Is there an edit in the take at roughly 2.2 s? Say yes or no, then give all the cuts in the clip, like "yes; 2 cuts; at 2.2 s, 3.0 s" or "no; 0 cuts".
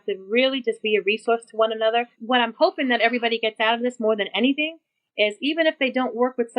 yes; 1 cut; at 2.2 s